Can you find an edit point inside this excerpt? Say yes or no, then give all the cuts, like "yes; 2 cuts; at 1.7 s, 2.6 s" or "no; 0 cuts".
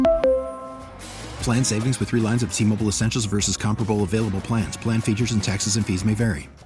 no; 0 cuts